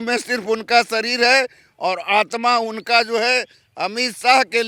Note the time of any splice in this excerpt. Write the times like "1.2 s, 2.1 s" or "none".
none